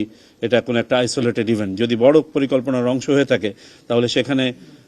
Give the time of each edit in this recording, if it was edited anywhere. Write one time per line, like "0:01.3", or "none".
none